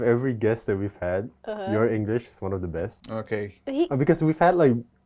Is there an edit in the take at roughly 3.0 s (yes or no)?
yes